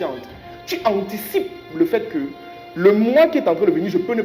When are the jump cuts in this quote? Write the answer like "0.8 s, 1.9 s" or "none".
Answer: none